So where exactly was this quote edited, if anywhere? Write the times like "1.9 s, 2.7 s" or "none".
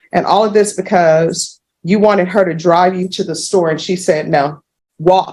none